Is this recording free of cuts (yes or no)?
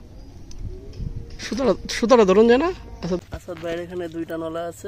no